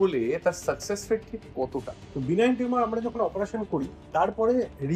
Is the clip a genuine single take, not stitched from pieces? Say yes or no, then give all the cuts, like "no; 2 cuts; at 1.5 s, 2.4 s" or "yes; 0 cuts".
no; 1 cut; at 2.0 s